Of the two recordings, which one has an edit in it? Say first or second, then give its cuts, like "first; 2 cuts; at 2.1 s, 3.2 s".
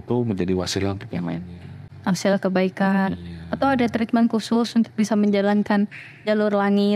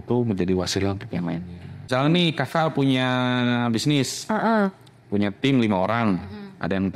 second; 1 cut; at 1.8 s